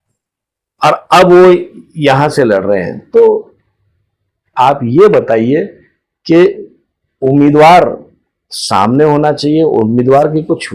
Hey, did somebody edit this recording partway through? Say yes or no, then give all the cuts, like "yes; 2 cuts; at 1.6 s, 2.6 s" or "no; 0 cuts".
no; 0 cuts